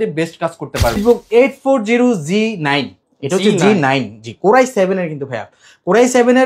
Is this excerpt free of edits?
no; 1 cut; at 1.0 s

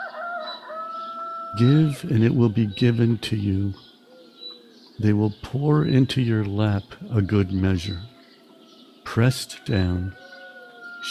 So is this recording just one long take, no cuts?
no; 1 cut; at 1.5 s

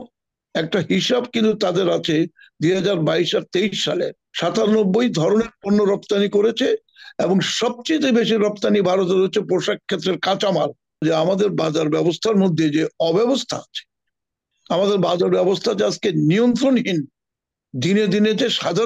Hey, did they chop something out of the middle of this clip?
yes; 2 cuts; at 4.2 s, 11.0 s

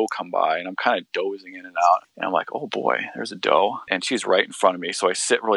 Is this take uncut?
no; 2 cuts; at 2.1 s, 3.9 s

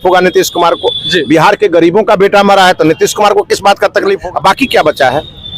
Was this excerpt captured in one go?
no; 1 cut; at 4.2 s

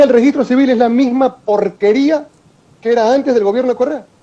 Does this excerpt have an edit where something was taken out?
no; 0 cuts

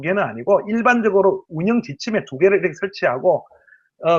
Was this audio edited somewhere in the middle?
no; 0 cuts

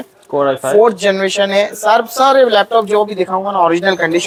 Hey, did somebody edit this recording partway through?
no; 0 cuts

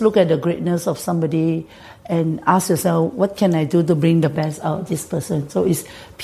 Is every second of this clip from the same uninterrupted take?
yes; 0 cuts

